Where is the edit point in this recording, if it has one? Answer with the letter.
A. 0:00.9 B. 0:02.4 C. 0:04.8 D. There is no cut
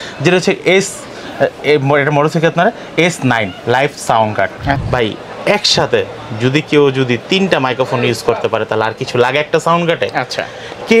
C